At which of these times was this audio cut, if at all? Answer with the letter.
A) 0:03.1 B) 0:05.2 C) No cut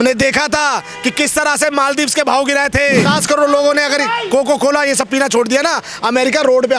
A